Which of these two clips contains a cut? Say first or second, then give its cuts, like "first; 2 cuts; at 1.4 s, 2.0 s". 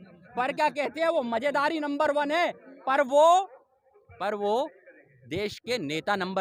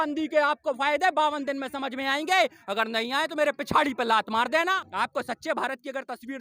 second; 1 cut; at 4.8 s